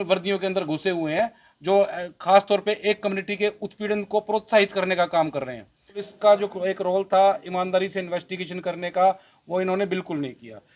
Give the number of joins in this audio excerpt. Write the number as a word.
one